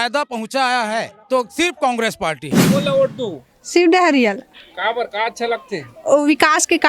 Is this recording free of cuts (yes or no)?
no